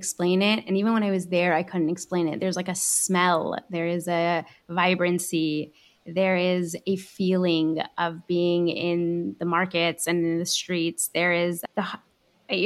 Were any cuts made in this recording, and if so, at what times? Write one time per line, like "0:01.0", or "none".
none